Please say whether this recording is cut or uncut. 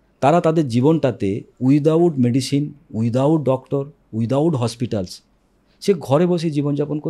uncut